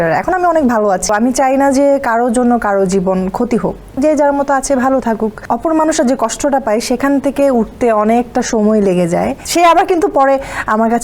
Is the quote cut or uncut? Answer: cut